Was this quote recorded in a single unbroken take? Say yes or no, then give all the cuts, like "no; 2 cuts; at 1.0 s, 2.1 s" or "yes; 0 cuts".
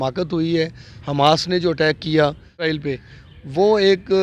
no; 1 cut; at 2.7 s